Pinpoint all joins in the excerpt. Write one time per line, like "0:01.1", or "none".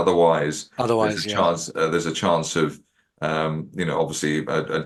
none